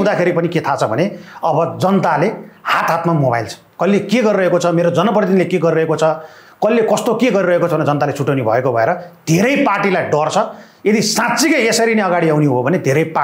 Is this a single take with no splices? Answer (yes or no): yes